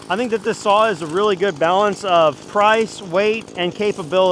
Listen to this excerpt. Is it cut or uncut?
cut